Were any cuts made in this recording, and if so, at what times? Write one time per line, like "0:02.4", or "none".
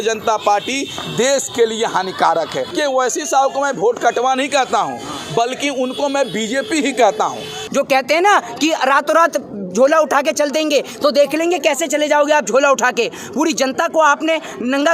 0:02.7
0:07.6